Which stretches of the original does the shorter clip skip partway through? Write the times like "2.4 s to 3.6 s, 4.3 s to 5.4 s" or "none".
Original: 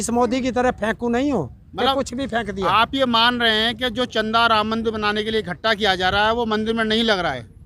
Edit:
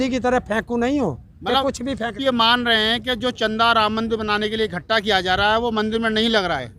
2.5 s to 2.9 s

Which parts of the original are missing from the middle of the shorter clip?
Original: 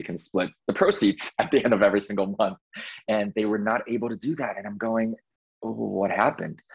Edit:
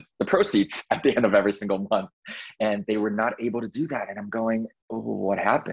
5.3 s to 5.5 s

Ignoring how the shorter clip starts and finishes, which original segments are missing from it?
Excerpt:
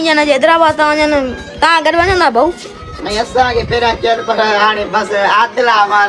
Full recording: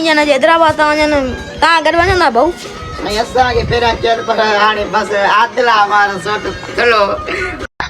none

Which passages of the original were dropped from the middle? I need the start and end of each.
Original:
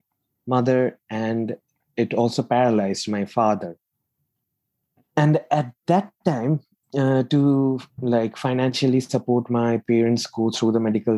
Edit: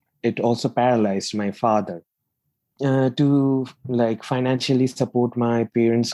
4.4 s to 6.8 s

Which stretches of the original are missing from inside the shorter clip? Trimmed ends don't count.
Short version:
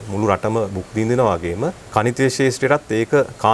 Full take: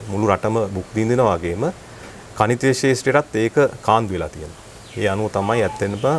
1.8 s to 2.2 s

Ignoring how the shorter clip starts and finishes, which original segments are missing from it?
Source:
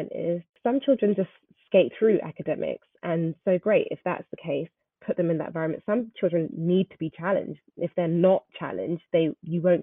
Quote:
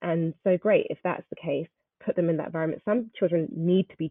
none

